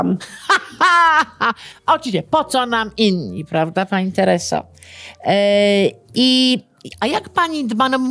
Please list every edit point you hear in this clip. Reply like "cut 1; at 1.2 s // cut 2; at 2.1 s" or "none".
none